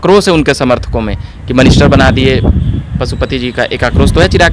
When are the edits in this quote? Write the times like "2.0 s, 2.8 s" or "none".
none